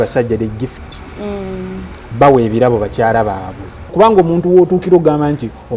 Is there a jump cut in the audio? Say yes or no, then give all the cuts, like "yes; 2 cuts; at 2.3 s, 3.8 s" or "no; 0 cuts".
yes; 1 cut; at 3.9 s